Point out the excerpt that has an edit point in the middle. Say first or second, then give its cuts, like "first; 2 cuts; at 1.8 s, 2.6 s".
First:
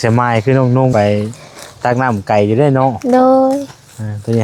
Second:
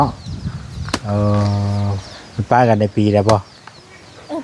first; 1 cut; at 0.9 s